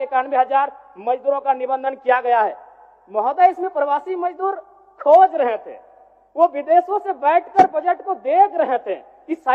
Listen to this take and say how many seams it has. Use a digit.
0